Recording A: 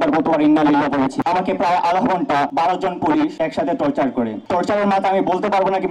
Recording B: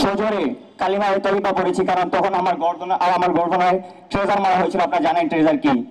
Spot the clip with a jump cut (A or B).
A